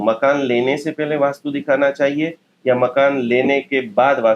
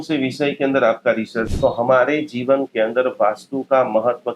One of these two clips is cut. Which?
second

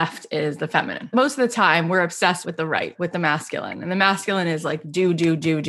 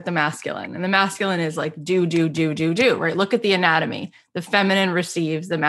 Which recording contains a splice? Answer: first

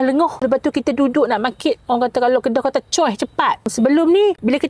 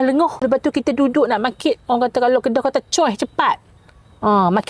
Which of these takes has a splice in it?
first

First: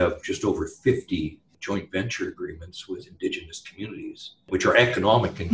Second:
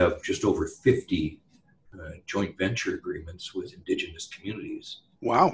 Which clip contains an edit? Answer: first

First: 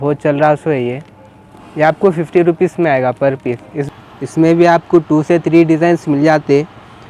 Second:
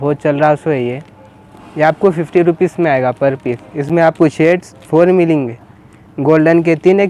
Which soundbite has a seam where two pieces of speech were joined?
first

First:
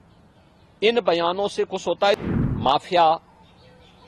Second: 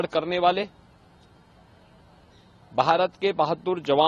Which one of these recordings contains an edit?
first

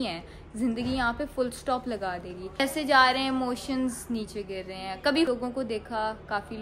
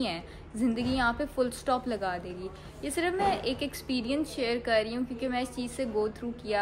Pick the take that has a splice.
first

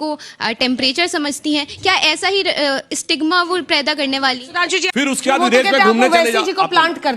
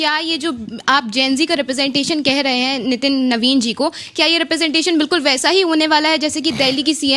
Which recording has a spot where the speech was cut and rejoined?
first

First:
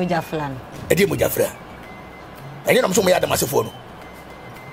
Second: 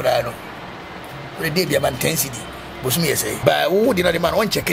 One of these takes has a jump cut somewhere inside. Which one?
second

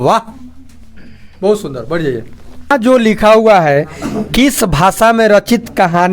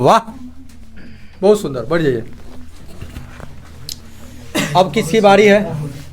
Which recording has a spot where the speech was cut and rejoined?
first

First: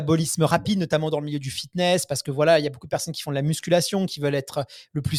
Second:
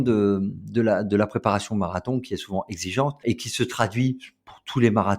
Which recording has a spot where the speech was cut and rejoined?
second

